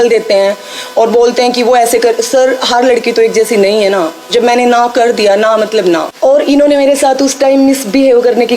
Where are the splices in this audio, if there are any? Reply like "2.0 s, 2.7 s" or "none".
6.1 s